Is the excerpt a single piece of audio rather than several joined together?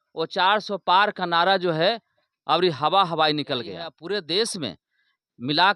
no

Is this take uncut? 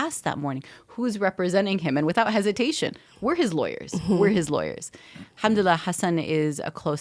yes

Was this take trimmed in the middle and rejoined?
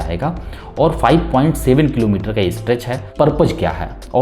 yes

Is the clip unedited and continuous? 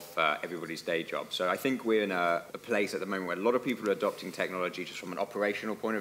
no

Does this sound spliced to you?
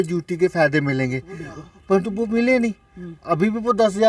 no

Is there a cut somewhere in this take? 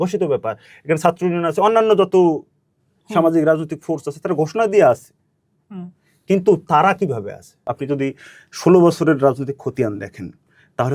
yes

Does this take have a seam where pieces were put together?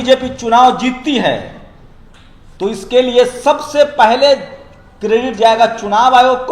no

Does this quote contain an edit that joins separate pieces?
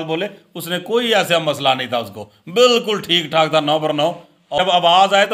yes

